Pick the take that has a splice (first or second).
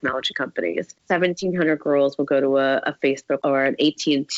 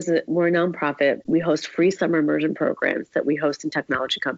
first